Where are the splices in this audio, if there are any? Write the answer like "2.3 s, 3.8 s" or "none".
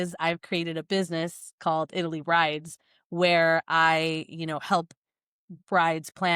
none